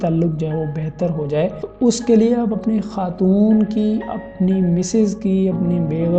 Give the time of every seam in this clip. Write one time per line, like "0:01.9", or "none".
0:01.6